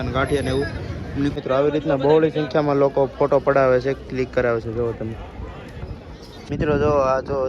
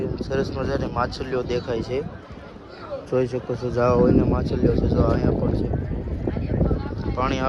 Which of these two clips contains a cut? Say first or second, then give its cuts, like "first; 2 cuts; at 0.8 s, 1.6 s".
first; 2 cuts; at 1.3 s, 6.4 s